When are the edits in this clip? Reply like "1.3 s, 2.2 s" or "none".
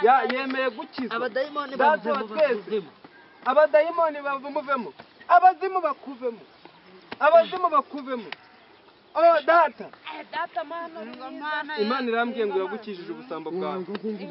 none